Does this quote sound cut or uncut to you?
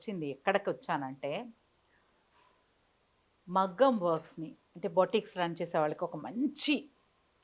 uncut